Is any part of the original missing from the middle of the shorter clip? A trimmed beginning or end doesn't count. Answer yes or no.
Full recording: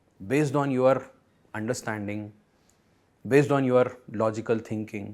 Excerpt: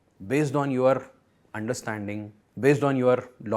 yes